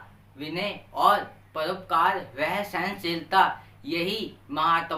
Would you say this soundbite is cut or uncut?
uncut